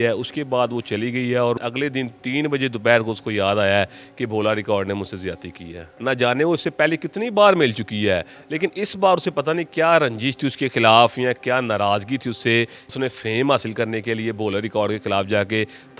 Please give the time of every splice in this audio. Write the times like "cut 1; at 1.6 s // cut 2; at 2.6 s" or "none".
cut 1; at 1.6 s // cut 2; at 5.8 s // cut 3; at 12.9 s